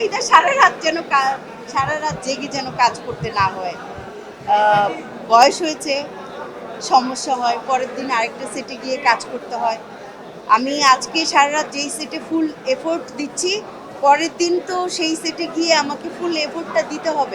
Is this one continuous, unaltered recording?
yes; 0 cuts

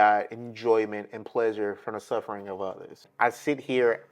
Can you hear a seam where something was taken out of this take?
yes; 1 cut; at 3.0 s

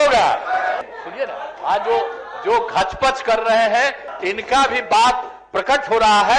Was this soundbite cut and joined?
yes; 2 cuts; at 0.9 s, 4.1 s

